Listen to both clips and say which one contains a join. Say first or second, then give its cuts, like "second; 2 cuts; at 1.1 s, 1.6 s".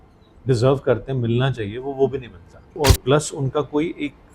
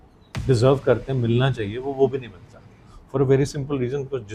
first; 1 cut; at 2.7 s